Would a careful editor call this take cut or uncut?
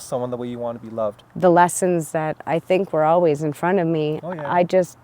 cut